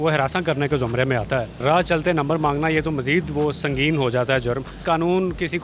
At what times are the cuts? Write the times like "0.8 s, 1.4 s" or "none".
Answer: 1.6 s, 4.8 s

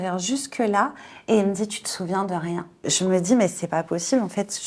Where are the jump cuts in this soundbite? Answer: 2.7 s

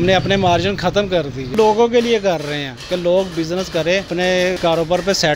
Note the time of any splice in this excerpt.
1.5 s, 4.3 s

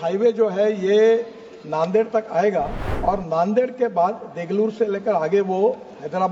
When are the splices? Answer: 2.8 s

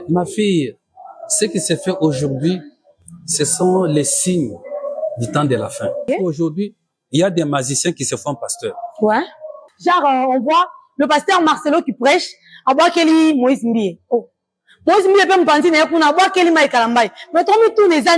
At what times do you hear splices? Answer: 6.1 s, 9.7 s

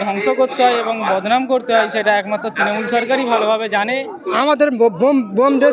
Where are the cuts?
4.2 s

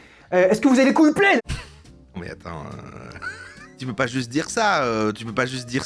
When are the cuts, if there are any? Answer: 1.4 s, 3.7 s

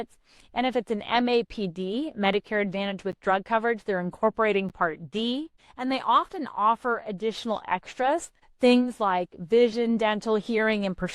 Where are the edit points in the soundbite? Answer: 5.6 s, 8.4 s

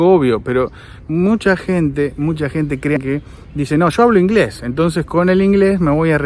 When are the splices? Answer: 3.0 s

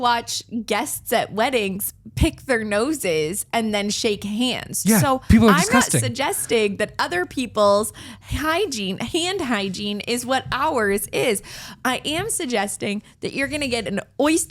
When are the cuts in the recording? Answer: none

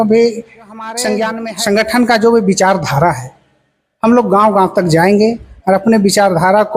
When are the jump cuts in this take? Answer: 1.4 s

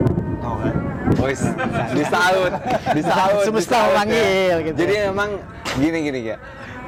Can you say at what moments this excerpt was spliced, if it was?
none

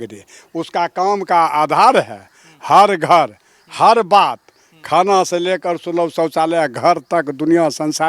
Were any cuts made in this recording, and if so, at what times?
none

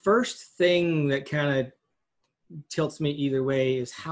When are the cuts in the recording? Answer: none

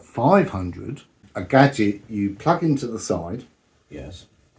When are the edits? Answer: 1.3 s

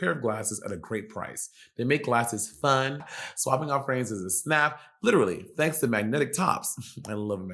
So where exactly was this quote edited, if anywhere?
3.1 s

